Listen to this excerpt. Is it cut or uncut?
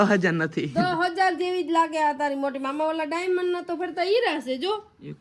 uncut